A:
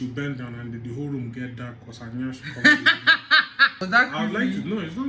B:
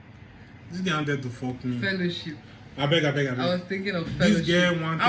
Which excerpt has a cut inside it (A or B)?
A